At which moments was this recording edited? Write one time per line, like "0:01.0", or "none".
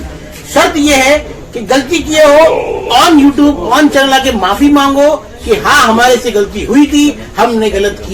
none